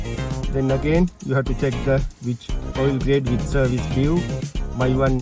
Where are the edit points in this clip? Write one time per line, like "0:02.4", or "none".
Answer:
none